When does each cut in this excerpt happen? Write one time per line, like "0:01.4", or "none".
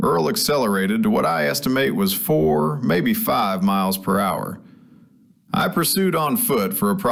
none